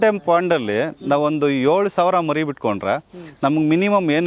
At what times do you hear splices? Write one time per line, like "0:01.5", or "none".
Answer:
none

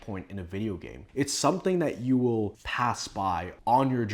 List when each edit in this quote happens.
0:01.0
0:02.6

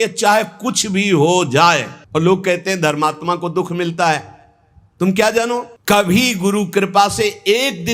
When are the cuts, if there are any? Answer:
0:01.9
0:05.7

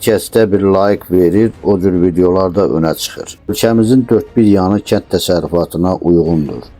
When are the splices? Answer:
0:03.5

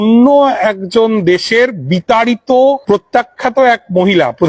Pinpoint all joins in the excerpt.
0:02.8

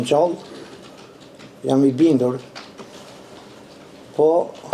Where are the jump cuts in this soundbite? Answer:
none

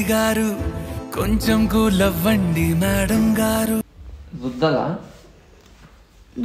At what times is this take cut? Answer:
0:03.8

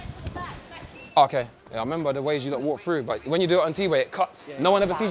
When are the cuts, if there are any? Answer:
none

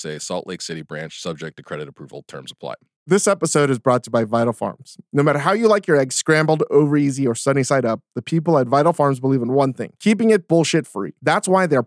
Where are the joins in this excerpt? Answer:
0:02.9

